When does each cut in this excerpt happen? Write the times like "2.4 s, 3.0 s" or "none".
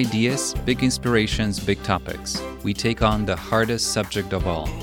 none